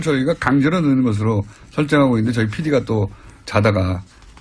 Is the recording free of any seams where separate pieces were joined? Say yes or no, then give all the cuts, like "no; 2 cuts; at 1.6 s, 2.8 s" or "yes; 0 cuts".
yes; 0 cuts